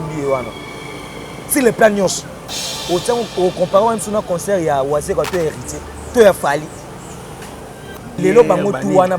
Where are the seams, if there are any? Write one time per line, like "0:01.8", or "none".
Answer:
0:08.1